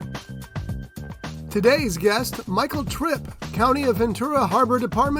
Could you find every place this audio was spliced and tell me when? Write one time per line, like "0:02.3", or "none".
0:01.5